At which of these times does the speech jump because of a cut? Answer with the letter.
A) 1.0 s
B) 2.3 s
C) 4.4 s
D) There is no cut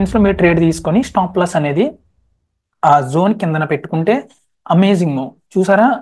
D